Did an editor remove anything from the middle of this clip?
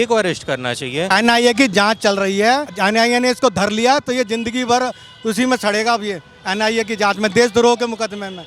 yes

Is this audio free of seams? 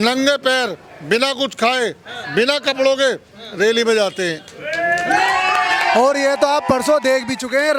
yes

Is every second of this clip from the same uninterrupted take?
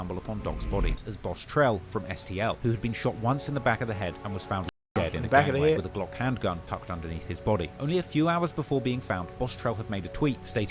no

